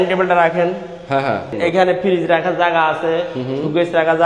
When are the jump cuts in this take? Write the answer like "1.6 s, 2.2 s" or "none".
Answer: 1.5 s